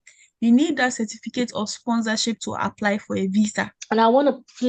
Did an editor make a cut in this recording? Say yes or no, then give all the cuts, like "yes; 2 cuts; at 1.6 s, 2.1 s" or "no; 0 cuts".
yes; 1 cut; at 3.7 s